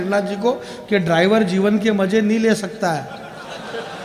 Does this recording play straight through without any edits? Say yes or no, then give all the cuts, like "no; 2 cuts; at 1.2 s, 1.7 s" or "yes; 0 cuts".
yes; 0 cuts